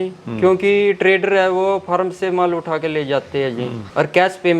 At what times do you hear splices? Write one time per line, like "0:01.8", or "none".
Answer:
none